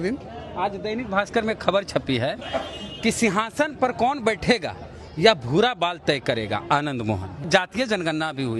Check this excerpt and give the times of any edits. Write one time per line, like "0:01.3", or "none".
0:07.4